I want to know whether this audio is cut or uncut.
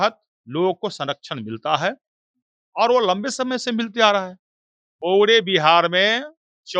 cut